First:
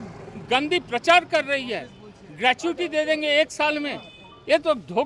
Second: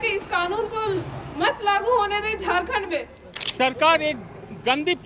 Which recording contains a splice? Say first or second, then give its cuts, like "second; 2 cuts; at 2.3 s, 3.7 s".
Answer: second; 1 cut; at 3.2 s